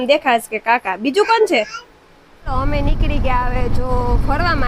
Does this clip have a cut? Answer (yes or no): yes